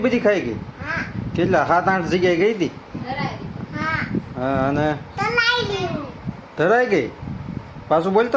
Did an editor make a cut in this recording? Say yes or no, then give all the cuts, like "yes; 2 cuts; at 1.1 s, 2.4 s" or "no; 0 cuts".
no; 0 cuts